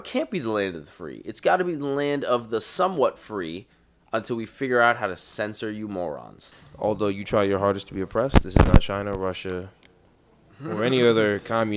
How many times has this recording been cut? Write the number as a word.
one